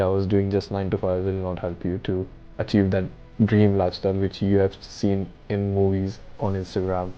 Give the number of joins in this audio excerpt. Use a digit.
0